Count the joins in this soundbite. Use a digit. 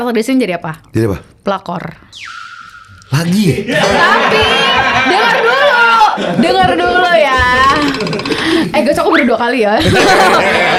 0